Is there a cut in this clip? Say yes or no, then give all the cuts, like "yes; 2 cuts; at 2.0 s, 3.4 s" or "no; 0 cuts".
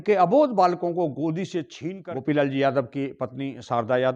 yes; 1 cut; at 1.8 s